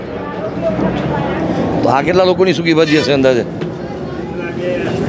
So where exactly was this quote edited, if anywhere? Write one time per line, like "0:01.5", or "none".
0:01.3